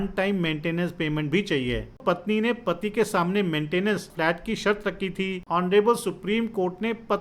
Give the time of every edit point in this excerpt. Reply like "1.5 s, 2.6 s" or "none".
2.0 s, 4.1 s, 5.4 s